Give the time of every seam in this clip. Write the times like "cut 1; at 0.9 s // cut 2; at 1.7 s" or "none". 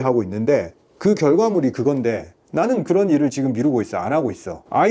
none